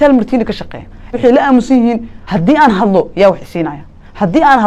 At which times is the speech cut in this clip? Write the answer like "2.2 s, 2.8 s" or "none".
1.2 s, 2.2 s